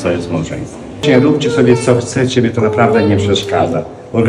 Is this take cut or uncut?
cut